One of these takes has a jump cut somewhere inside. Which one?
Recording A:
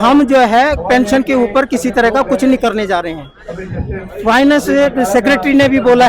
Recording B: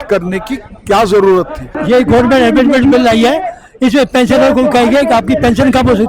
B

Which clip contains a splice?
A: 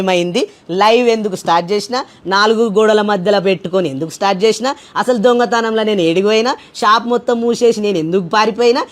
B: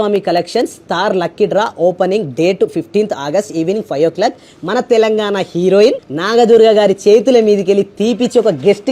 B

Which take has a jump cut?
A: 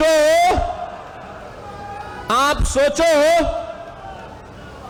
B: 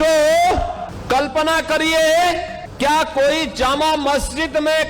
B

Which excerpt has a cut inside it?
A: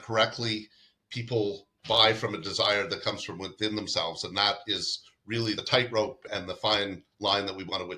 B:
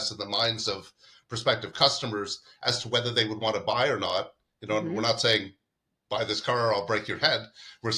A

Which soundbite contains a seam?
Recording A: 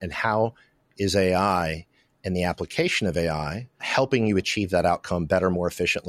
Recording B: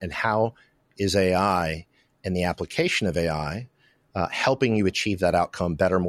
A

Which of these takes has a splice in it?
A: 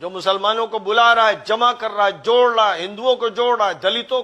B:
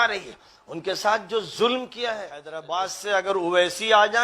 B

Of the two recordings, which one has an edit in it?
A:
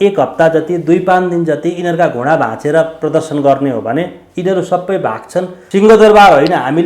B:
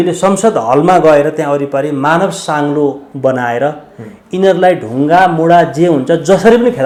A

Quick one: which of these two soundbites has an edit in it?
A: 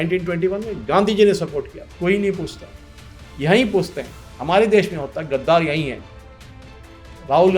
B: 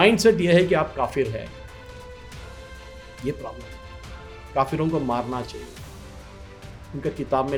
A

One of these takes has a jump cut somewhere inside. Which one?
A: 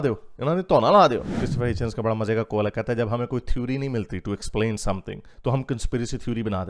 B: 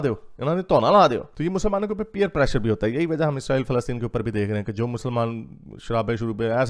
A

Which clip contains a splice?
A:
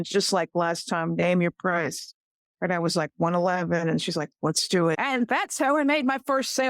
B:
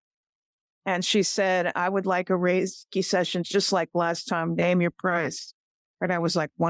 A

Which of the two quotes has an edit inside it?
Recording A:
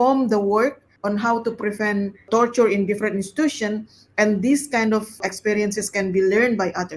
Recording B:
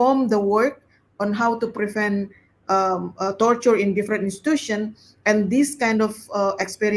A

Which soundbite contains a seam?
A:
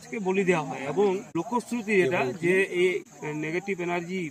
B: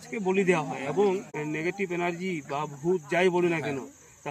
B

